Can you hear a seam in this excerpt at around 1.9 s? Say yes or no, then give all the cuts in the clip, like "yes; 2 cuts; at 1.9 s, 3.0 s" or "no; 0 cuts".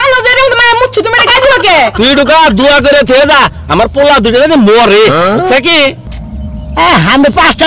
yes; 1 cut; at 1.9 s